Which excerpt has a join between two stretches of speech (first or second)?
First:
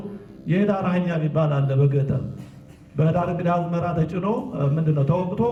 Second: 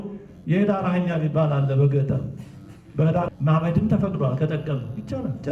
second